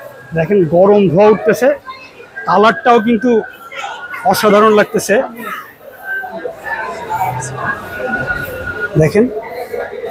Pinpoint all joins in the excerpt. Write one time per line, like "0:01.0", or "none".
none